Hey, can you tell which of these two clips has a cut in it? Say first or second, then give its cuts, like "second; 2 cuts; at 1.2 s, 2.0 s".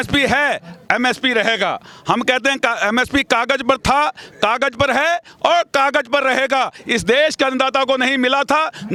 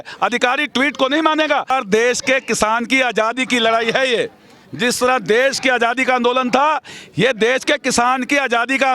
second; 1 cut; at 1.7 s